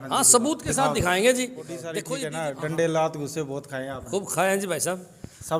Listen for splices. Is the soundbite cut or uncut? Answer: cut